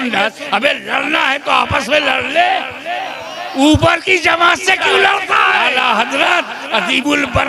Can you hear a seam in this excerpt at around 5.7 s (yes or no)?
yes